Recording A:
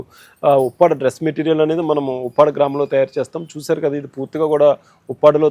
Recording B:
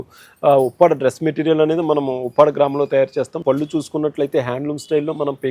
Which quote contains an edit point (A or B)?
B